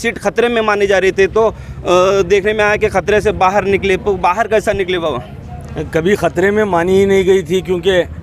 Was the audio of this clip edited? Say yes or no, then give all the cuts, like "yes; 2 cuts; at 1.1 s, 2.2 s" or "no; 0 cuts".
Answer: no; 0 cuts